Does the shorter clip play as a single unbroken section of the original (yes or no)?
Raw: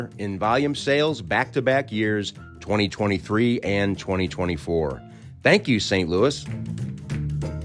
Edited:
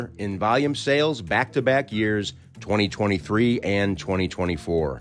yes